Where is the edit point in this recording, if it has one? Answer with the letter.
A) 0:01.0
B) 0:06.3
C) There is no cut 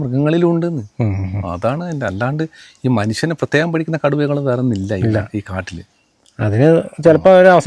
C